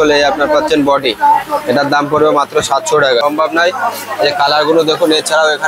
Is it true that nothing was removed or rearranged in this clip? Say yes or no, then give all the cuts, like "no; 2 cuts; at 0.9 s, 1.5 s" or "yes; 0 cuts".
no; 1 cut; at 3.2 s